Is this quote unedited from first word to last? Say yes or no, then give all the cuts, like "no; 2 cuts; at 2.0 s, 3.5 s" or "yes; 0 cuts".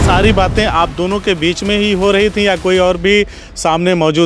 yes; 0 cuts